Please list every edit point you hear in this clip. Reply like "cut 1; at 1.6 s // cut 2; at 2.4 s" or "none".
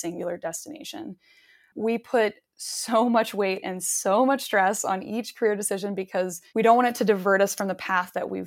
cut 1; at 1.7 s // cut 2; at 6.4 s

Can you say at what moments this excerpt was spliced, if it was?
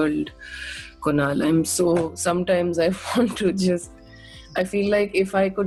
none

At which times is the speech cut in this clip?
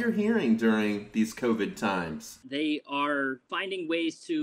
cut 1; at 2.4 s // cut 2; at 3.5 s

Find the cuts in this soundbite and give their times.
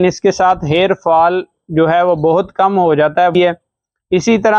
cut 1; at 3.4 s

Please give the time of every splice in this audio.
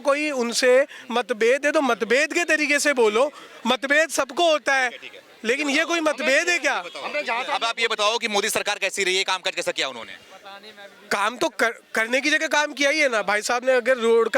none

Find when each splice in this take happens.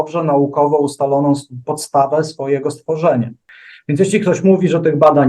cut 1; at 3.4 s

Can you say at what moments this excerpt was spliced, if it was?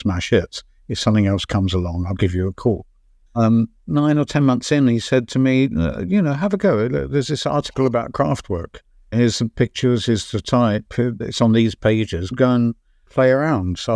cut 1; at 3.2 s

